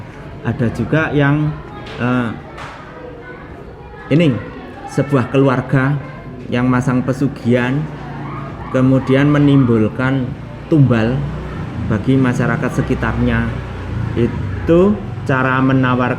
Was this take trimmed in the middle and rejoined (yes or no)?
no